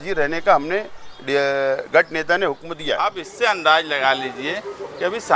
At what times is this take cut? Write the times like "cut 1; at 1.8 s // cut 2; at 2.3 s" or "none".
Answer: cut 1; at 2.8 s

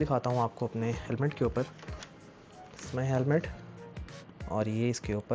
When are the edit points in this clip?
none

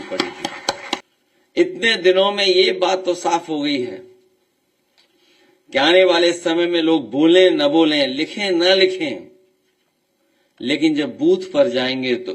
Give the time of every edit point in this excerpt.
cut 1; at 1.1 s

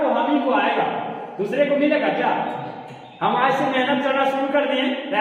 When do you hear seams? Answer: none

